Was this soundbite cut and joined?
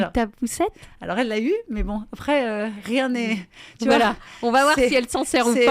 no; 0 cuts

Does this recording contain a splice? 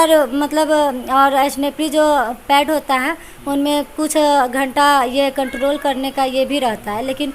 no; 0 cuts

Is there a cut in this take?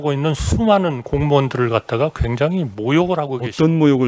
no; 0 cuts

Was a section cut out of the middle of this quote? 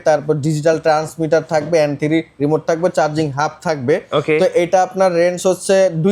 no; 0 cuts

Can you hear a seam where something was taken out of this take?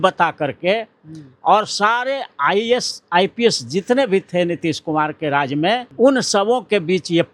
yes; 1 cut; at 5.9 s

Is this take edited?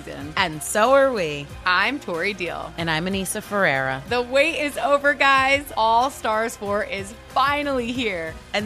no; 0 cuts

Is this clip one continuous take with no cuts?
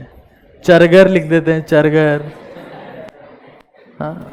yes; 0 cuts

